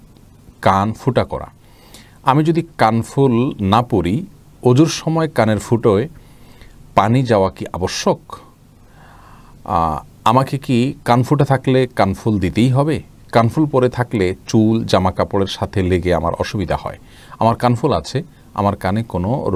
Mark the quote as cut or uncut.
uncut